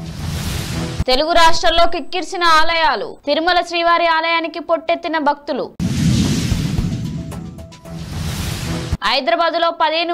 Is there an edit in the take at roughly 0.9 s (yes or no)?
yes